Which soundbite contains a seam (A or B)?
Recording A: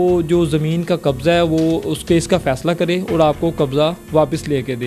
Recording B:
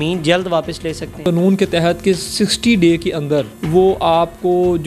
B